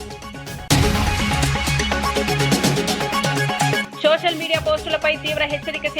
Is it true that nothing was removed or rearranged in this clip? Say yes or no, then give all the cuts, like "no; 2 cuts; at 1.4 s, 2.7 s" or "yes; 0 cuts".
no; 1 cut; at 2.2 s